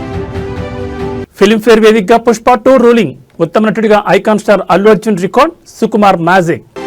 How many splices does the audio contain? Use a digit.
0